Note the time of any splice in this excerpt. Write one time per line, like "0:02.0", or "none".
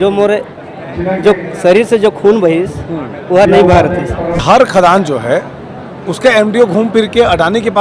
0:04.4